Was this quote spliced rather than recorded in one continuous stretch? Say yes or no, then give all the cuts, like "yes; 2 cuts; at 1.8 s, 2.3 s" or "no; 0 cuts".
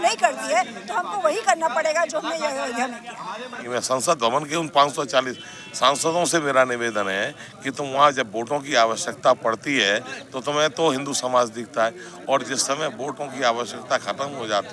yes; 1 cut; at 3.6 s